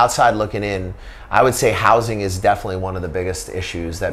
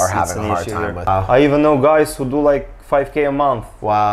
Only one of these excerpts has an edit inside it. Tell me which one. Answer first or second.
second